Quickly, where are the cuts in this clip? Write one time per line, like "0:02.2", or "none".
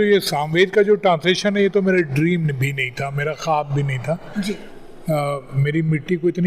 none